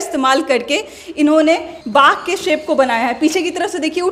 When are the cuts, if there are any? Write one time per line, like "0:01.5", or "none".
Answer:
0:01.7